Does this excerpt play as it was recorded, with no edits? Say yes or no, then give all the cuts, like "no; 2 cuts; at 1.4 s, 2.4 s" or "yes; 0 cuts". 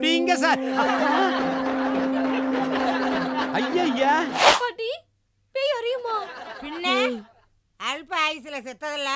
no; 1 cut; at 4.4 s